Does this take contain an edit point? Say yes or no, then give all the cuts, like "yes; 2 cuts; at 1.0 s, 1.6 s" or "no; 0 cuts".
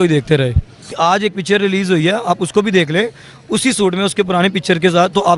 yes; 1 cut; at 0.9 s